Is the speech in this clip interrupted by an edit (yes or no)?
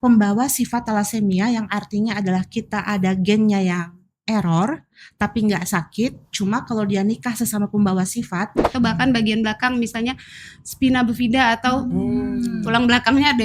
yes